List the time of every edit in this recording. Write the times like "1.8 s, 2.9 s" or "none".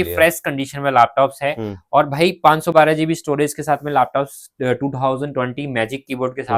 none